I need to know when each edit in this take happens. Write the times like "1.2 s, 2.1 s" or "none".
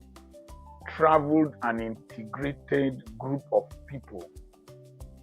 0.9 s